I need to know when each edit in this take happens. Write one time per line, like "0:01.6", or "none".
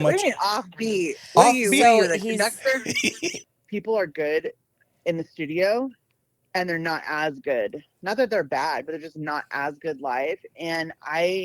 0:03.4